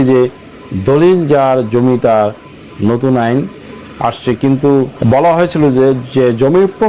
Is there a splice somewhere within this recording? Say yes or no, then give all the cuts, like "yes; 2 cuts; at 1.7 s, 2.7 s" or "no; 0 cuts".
yes; 1 cut; at 4.9 s